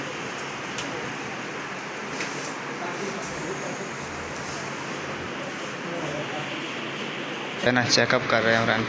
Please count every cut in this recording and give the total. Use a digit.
1